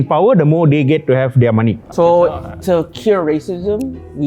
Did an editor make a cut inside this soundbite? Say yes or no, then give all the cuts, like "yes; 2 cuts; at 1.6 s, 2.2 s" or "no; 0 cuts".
yes; 1 cut; at 1.8 s